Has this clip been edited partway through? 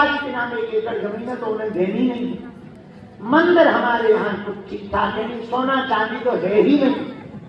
no; 0 cuts

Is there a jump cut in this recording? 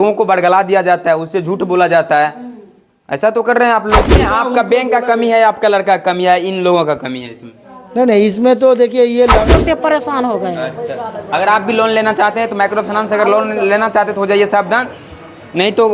yes; 2 cuts; at 4.2 s, 9.5 s

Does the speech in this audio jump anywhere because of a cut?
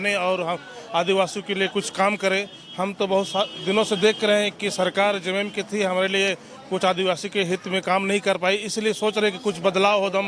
no; 0 cuts

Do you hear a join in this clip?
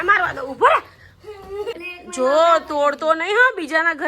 yes; 1 cut; at 1.7 s

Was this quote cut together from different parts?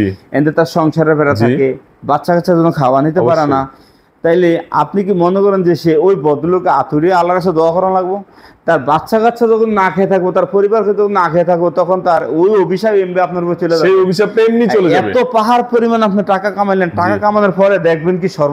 no; 0 cuts

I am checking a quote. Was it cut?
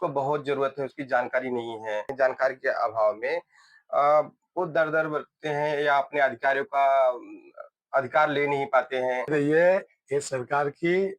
yes; 2 cuts; at 2.1 s, 9.3 s

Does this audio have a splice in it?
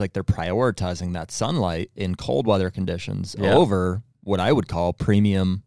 no; 0 cuts

